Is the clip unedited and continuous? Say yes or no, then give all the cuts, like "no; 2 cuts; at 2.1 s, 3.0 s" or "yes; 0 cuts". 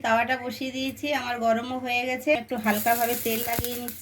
no; 1 cut; at 2.4 s